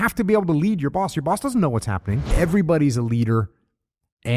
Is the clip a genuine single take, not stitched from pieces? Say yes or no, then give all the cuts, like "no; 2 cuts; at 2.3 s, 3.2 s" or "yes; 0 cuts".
no; 1 cut; at 2.2 s